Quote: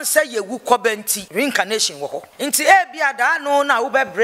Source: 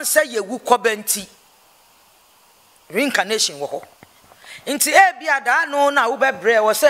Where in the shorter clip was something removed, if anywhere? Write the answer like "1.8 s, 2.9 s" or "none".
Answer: 1.2 s, 2.3 s